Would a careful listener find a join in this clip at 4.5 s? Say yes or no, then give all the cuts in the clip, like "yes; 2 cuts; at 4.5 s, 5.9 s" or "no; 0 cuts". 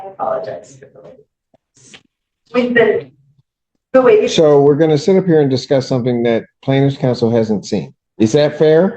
no; 1 cut; at 8.0 s